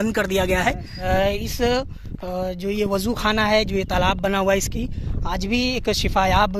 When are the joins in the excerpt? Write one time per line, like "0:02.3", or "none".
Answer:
0:01.0